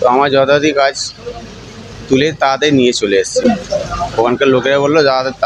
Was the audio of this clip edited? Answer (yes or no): no